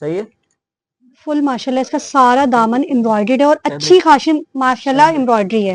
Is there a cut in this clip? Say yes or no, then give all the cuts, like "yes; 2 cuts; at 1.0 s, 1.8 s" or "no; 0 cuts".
no; 0 cuts